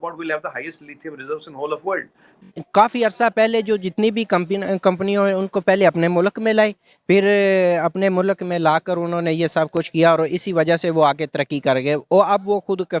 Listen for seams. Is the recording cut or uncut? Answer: cut